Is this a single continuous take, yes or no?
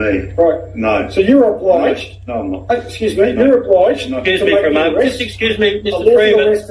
yes